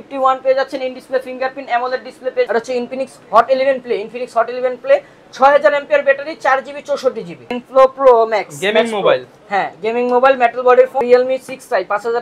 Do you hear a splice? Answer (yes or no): yes